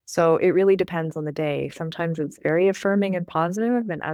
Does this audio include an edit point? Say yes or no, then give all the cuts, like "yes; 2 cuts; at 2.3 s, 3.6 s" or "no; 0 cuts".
no; 0 cuts